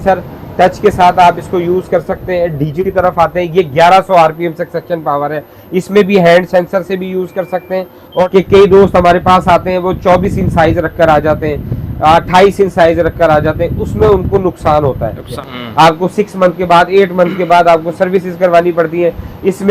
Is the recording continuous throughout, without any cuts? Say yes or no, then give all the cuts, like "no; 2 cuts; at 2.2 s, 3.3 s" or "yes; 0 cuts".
no; 3 cuts; at 2.7 s, 8.2 s, 15.3 s